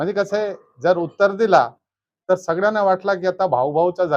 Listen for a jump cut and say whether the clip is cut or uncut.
uncut